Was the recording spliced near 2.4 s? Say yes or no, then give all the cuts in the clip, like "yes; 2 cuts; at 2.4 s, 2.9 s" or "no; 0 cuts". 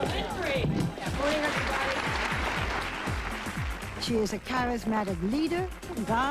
yes; 1 cut; at 2.4 s